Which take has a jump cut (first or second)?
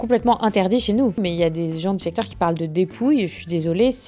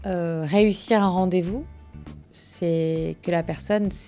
first